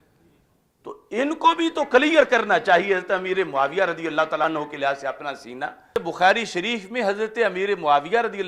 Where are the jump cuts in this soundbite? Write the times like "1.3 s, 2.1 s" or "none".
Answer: 4.4 s, 6.0 s